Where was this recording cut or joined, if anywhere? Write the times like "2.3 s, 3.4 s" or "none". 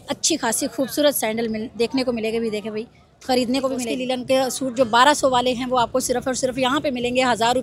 3.9 s